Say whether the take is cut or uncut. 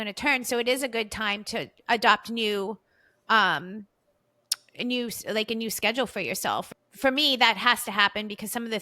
cut